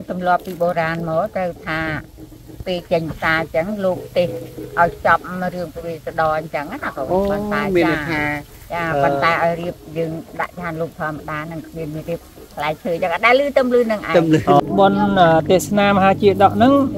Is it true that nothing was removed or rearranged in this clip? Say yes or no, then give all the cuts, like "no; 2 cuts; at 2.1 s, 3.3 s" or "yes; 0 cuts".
no; 1 cut; at 14.2 s